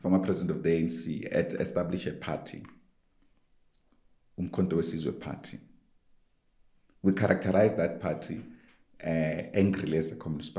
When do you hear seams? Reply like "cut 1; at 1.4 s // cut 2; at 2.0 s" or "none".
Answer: none

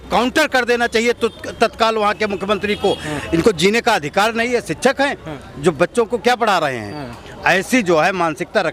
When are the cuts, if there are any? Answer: none

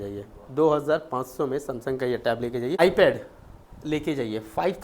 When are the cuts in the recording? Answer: cut 1; at 2.8 s

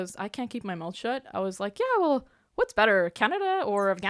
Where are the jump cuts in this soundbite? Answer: none

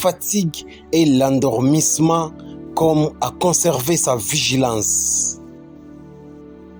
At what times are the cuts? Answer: none

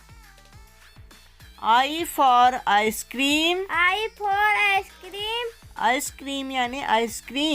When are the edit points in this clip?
cut 1; at 1.5 s

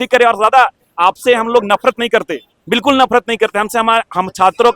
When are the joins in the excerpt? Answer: none

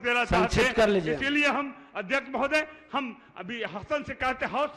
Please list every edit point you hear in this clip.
none

